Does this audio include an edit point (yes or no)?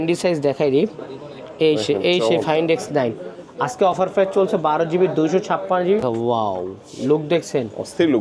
yes